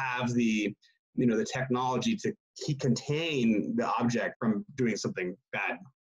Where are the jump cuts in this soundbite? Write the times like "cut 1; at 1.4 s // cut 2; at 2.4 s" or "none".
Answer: cut 1; at 4.3 s